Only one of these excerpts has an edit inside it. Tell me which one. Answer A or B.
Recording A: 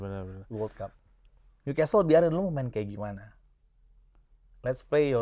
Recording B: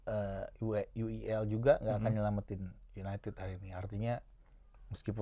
A